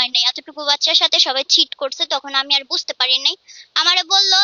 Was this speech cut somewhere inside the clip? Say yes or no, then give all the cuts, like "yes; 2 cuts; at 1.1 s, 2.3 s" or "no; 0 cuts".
no; 0 cuts